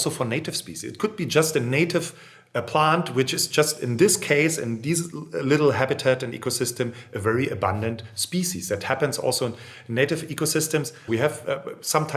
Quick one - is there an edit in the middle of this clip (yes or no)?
yes